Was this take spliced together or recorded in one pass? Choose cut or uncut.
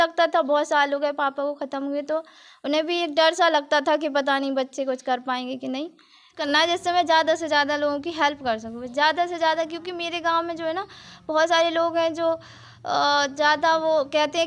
cut